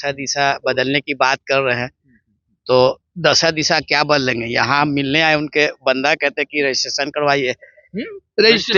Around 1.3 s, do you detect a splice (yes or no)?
no